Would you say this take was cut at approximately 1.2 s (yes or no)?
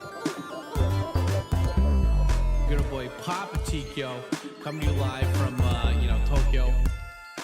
no